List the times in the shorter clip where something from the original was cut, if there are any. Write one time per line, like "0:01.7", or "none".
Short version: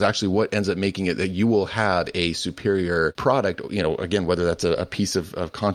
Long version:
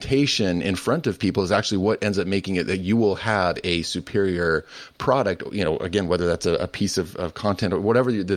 0:03.2